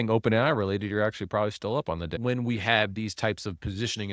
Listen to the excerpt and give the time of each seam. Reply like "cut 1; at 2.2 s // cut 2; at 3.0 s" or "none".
cut 1; at 2.1 s